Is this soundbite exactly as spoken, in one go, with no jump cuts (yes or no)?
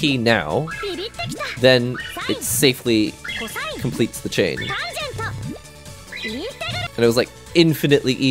no